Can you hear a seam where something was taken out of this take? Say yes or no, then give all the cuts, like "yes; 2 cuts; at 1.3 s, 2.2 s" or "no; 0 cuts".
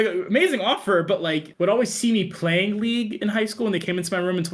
yes; 1 cut; at 1.5 s